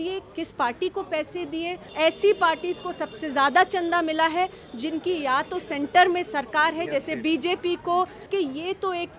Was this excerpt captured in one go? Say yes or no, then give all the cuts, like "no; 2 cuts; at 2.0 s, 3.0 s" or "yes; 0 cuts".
no; 2 cuts; at 1.8 s, 8.2 s